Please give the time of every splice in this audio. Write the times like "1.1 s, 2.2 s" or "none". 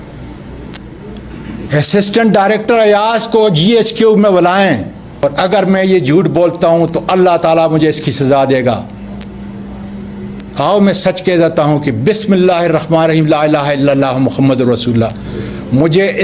5.2 s